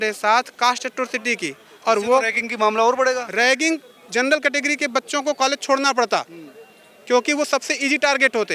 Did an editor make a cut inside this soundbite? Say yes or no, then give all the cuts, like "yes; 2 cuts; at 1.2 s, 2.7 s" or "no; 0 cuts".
no; 0 cuts